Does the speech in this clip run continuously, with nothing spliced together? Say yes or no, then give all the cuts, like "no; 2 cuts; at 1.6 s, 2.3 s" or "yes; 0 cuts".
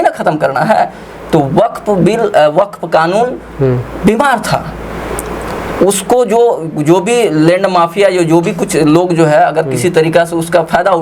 yes; 0 cuts